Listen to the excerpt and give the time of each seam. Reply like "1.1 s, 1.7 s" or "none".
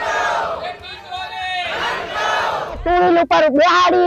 2.8 s